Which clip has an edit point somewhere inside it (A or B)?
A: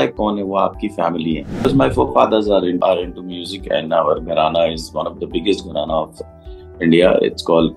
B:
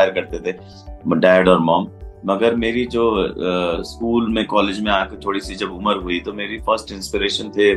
A